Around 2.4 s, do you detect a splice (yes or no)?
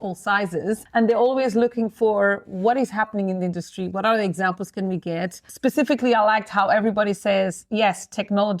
no